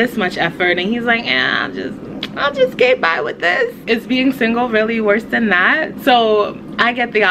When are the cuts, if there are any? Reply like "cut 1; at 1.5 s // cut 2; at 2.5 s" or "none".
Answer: cut 1; at 5.9 s

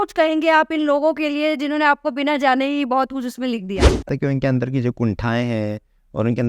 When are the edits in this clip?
cut 1; at 4.1 s

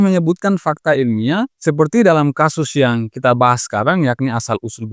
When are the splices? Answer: none

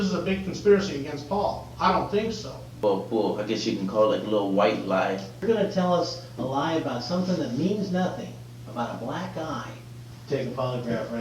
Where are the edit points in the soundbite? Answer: cut 1; at 2.7 s // cut 2; at 5.4 s // cut 3; at 10.1 s

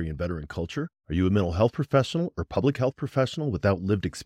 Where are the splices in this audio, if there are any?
none

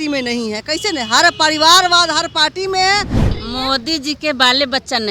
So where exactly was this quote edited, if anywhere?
cut 1; at 3.2 s

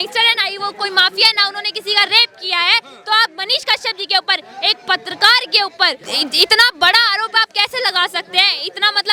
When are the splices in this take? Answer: none

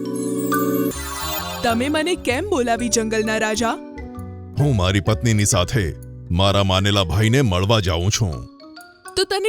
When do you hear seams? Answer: cut 1; at 0.9 s

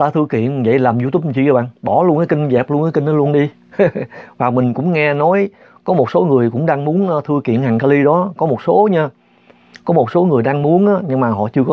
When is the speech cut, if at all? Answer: none

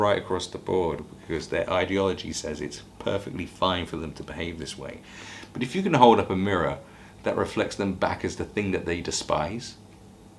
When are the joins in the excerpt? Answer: cut 1; at 1.0 s

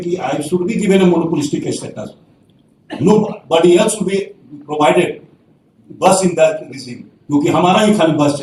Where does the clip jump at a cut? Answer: none

